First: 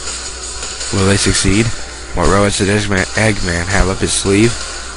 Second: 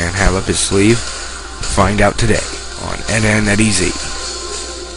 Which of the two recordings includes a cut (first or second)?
first